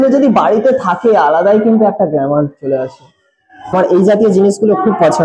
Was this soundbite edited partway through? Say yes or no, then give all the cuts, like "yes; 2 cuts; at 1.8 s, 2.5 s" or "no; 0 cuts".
yes; 1 cut; at 3.7 s